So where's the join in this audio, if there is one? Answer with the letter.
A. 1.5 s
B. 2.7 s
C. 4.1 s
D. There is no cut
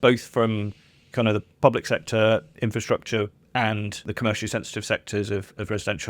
C